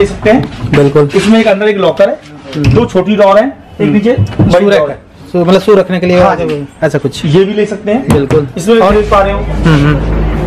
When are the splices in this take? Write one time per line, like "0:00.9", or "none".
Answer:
0:08.9